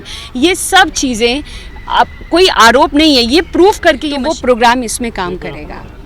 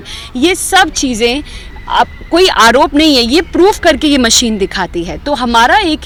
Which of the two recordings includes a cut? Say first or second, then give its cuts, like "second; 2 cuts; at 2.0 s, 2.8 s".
first; 1 cut; at 4.0 s